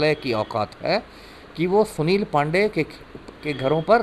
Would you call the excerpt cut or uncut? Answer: uncut